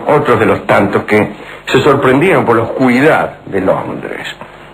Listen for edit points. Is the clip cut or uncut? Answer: cut